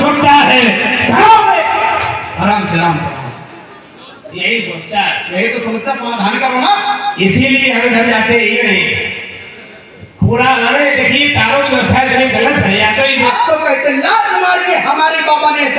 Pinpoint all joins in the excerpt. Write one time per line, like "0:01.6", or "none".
0:13.3

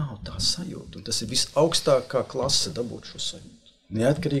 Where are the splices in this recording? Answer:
none

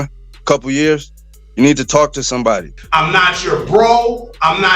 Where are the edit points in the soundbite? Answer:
0:02.8

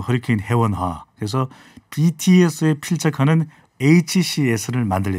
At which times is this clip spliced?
none

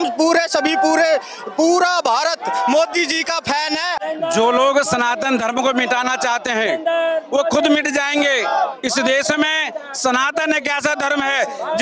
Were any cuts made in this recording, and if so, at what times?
0:04.0

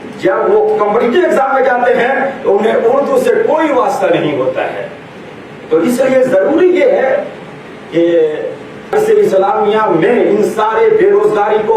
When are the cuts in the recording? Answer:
0:08.9

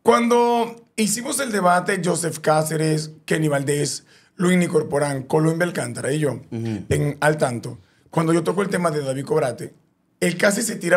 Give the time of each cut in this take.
none

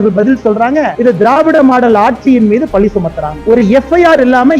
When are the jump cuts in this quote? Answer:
0:03.4

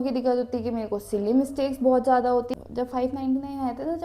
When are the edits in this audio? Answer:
0:02.5

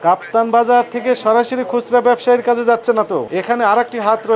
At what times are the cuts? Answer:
0:03.3

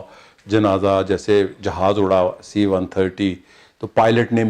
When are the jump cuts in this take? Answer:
none

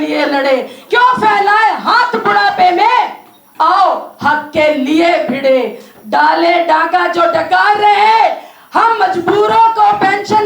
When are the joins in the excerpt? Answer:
none

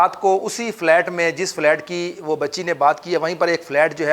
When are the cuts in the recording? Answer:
none

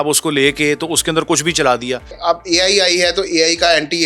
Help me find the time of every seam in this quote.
0:02.1

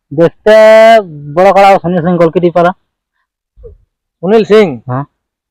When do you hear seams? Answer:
none

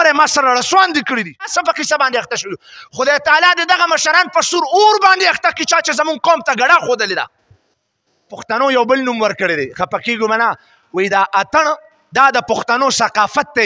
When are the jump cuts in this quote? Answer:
0:01.3
0:08.5

